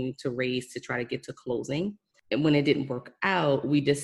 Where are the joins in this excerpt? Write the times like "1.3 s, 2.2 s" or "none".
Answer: 2.1 s